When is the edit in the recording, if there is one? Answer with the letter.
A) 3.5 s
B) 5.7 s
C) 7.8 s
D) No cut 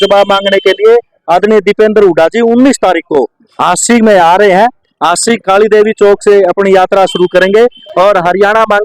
C